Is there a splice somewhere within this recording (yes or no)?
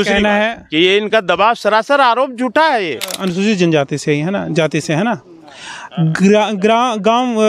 yes